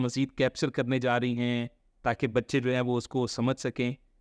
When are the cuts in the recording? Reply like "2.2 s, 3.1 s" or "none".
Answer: none